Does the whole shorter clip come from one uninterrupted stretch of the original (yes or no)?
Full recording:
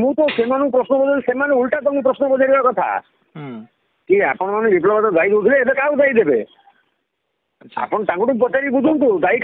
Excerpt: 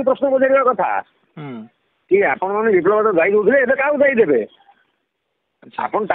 yes